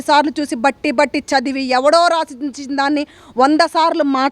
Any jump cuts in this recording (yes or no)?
no